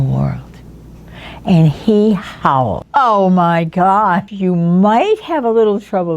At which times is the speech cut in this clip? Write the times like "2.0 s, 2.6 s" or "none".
2.8 s, 4.2 s